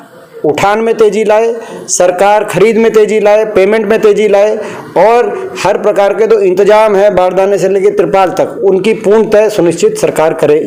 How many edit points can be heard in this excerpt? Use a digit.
0